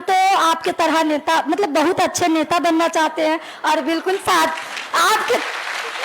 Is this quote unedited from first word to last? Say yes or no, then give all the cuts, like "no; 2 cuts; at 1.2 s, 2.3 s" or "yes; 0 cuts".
yes; 0 cuts